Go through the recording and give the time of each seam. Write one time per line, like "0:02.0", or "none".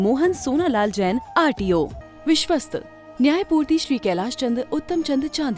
0:02.0